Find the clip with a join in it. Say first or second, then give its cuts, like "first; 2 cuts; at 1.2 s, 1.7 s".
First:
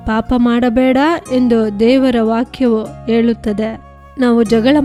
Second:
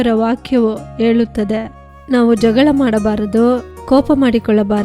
second; 1 cut; at 3.7 s